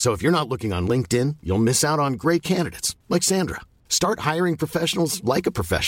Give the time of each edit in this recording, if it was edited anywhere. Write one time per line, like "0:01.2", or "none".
none

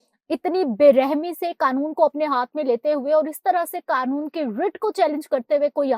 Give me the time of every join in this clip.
none

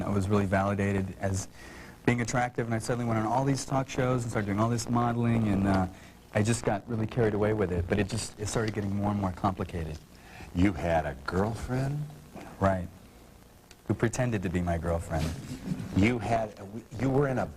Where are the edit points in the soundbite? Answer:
0:15.4

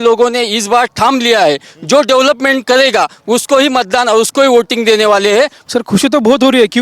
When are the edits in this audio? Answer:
0:05.6

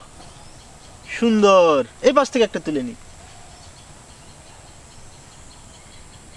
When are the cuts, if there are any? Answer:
none

